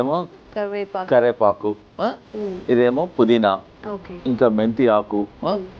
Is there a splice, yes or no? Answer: no